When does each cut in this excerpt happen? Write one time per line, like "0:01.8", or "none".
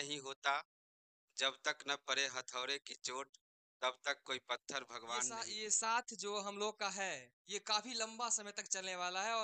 0:05.5

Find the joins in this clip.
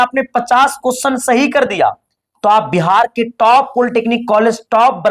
none

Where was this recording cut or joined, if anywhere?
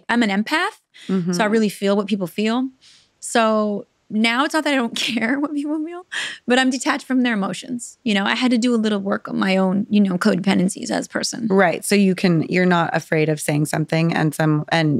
none

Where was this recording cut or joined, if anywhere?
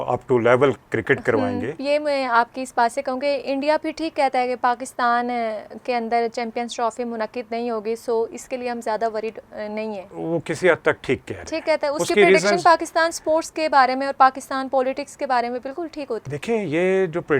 0:01.8
0:10.1
0:16.2

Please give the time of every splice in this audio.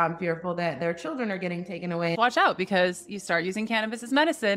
0:02.1

